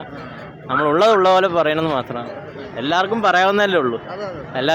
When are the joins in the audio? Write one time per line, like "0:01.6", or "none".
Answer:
none